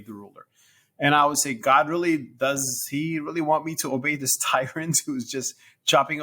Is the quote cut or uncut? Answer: uncut